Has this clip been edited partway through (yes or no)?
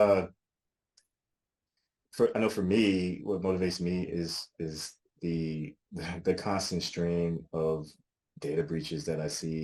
no